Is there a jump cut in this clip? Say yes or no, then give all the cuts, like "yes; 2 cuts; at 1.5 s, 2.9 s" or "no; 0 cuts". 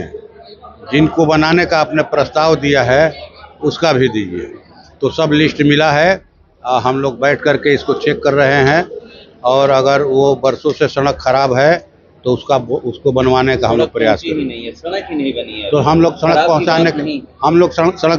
no; 0 cuts